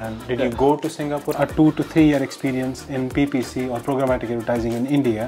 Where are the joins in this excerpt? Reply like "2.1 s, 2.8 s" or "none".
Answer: 1.3 s